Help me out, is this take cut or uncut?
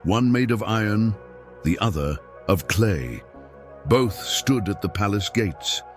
uncut